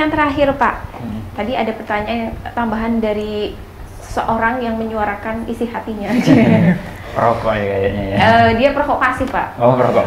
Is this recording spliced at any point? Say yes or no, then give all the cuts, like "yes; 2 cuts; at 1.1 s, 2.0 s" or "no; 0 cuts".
no; 0 cuts